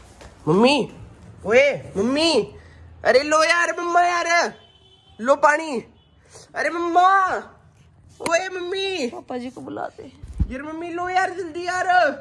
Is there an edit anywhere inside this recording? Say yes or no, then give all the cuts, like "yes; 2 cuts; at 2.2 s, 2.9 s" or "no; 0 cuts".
no; 0 cuts